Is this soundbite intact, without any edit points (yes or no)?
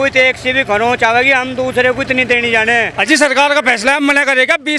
no